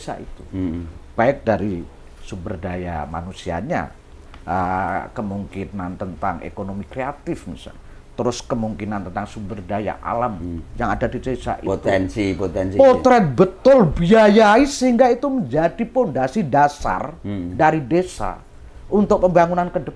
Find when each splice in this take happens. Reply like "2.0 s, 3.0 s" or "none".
none